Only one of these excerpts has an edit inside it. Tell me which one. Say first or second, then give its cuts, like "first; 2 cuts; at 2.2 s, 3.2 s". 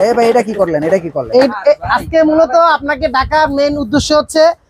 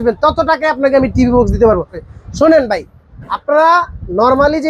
second; 1 cut; at 2.1 s